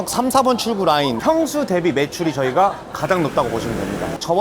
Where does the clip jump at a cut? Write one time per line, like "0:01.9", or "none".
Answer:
0:01.2

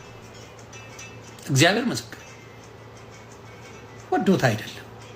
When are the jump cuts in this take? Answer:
0:03.4

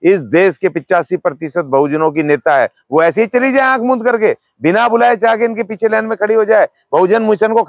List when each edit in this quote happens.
none

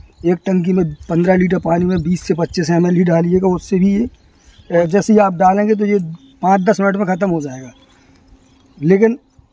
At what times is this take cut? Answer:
0:04.9

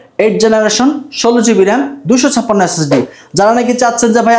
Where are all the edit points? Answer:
0:03.2

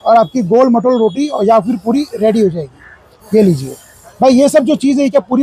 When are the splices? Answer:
none

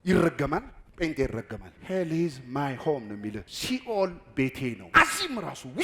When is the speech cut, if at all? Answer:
0:01.7
0:03.5
0:04.8

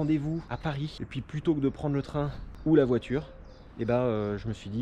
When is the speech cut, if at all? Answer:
0:00.9

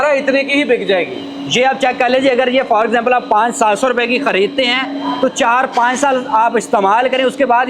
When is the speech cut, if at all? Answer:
none

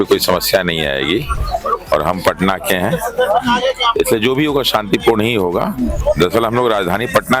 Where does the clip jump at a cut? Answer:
0:01.4
0:06.0

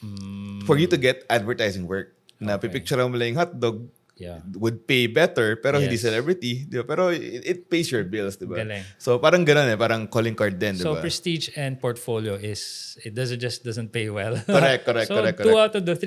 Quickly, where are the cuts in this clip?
none

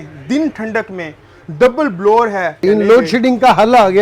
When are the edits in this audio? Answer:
0:02.6

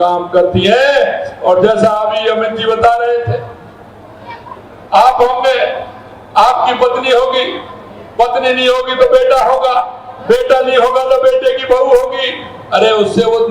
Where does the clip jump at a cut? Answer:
none

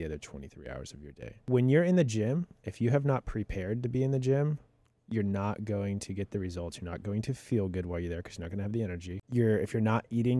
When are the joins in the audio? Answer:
0:01.4
0:09.2

